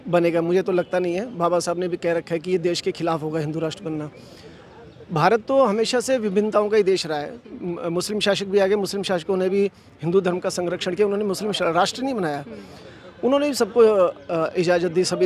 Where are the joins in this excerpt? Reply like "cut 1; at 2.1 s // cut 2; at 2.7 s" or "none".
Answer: none